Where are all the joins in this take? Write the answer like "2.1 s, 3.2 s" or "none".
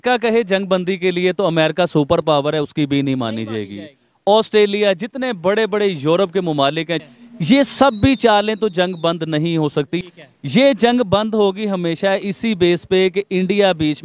7.0 s, 10.0 s